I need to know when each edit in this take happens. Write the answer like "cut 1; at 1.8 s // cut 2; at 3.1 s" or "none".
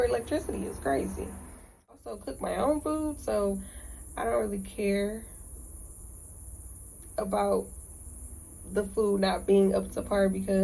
cut 1; at 1.9 s

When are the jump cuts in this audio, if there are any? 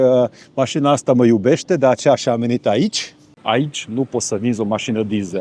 cut 1; at 3.4 s

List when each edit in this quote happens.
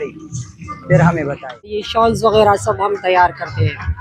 cut 1; at 1.9 s

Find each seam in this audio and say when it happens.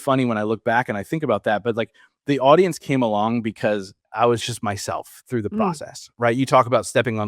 cut 1; at 4.1 s

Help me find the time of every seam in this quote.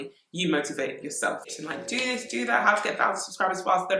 cut 1; at 1.5 s

